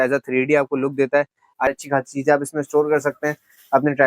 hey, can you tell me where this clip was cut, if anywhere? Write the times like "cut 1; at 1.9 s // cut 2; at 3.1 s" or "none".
cut 1; at 1.7 s